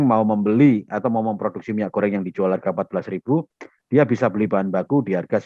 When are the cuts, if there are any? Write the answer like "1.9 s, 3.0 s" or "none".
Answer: none